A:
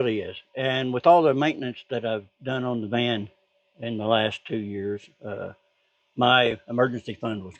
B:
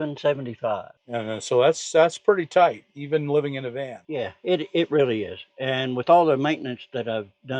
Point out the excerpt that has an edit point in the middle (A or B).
B